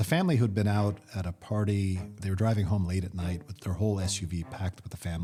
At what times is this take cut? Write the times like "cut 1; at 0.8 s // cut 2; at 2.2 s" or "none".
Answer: none